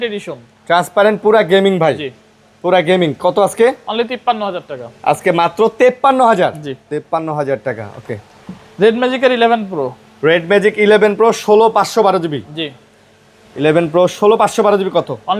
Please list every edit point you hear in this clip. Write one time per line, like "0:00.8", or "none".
none